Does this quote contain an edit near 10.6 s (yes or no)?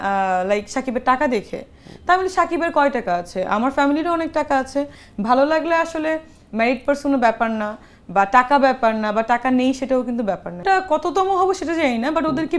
yes